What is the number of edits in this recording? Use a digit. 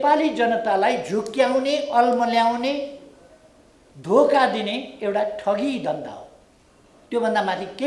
0